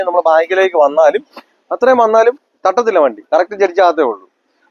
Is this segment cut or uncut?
uncut